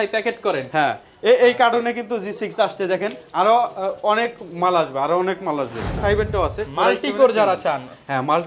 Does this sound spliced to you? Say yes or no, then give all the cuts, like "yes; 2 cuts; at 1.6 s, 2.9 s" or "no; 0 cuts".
yes; 1 cut; at 6.0 s